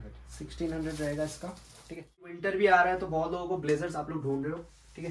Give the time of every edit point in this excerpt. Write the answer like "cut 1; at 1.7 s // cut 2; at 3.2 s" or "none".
cut 1; at 2.3 s